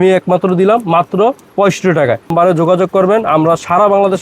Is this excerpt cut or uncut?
cut